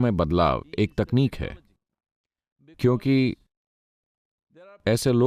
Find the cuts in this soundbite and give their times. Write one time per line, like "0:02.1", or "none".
none